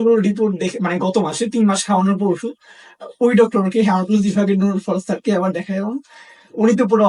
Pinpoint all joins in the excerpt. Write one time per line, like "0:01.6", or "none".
none